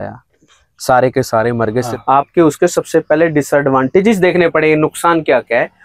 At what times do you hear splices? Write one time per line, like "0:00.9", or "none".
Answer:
0:01.9